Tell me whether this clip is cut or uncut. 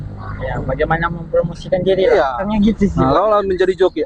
cut